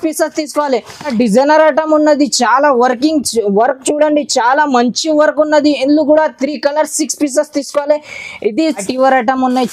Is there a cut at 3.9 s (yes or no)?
no